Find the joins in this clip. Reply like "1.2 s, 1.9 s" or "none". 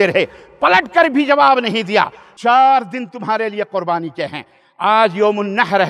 2.2 s